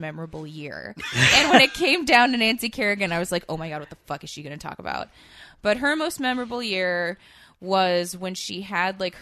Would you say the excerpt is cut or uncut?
uncut